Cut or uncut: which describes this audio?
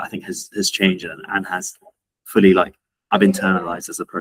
uncut